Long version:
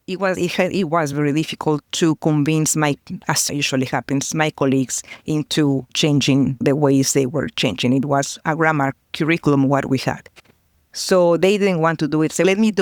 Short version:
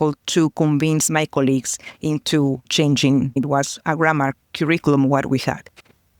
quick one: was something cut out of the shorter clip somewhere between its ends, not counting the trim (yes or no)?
yes